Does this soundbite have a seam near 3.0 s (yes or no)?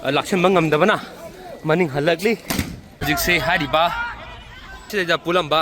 yes